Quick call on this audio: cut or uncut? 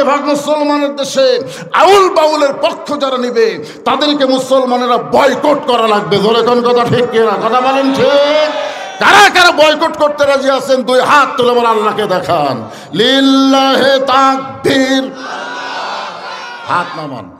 uncut